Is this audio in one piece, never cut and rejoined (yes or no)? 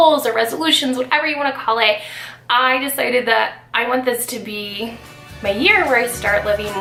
yes